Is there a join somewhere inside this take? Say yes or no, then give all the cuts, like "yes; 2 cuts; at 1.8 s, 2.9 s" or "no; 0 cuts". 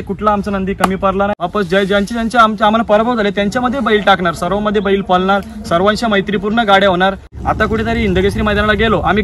yes; 2 cuts; at 1.4 s, 7.3 s